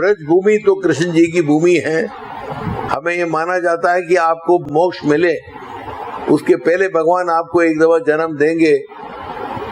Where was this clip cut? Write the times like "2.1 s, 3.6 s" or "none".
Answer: 2.8 s, 4.7 s